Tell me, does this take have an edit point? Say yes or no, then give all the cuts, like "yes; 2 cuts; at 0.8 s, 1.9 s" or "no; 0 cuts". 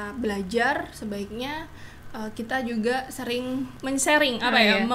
yes; 1 cut; at 3.7 s